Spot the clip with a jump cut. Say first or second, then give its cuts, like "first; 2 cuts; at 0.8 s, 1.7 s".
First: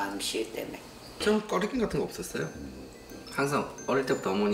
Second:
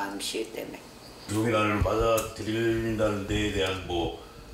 first; 1 cut; at 1.2 s